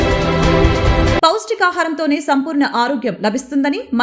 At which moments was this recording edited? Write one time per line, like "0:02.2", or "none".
none